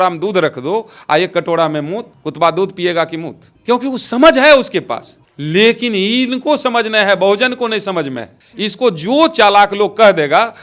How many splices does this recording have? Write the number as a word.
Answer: zero